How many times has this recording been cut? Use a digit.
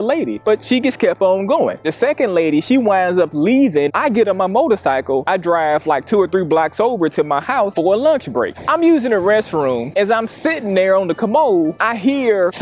0